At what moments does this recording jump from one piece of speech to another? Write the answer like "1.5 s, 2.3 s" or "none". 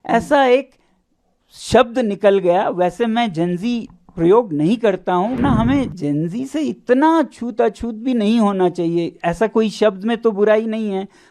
5.4 s